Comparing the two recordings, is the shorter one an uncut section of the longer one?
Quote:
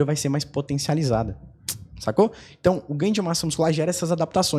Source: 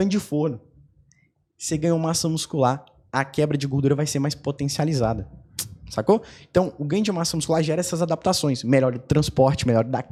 yes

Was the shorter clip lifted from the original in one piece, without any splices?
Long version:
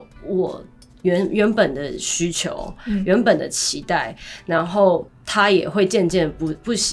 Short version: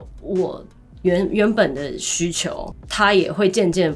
no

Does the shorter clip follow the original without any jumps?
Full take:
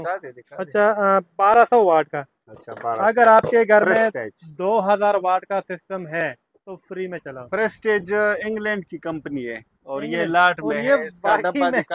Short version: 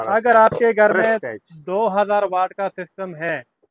yes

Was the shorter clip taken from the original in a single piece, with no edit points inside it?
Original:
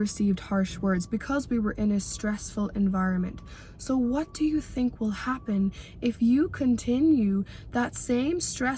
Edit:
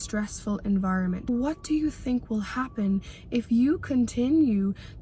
no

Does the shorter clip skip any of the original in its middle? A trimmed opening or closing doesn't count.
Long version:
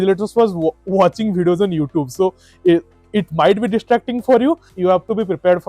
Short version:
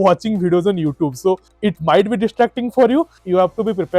yes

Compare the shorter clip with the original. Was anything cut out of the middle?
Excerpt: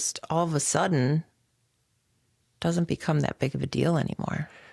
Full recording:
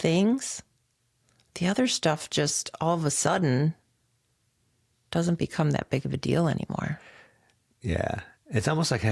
no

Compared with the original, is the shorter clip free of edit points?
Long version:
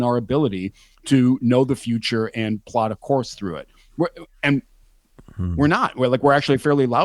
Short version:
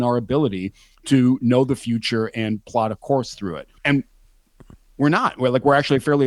no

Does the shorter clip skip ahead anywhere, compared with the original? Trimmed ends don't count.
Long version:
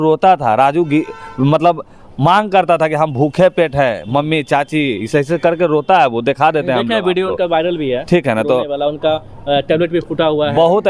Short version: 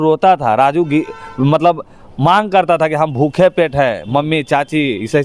no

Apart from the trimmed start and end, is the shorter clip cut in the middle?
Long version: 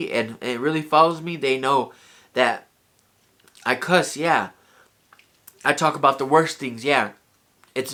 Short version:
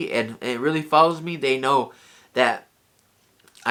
no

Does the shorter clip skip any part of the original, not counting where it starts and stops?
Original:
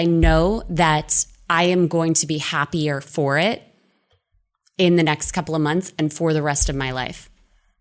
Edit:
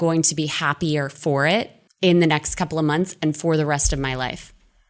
yes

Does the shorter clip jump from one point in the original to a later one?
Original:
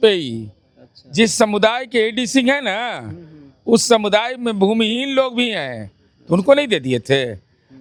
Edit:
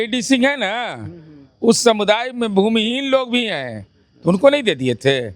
no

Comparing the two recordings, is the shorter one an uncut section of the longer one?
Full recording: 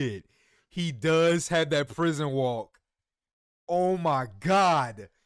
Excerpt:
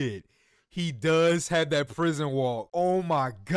no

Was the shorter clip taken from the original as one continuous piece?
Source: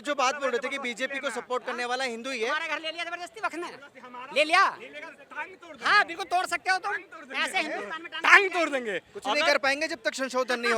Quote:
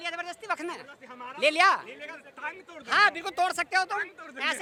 yes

